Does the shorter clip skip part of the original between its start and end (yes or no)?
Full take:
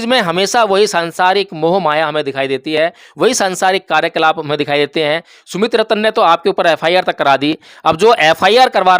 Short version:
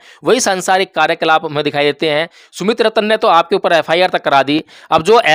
no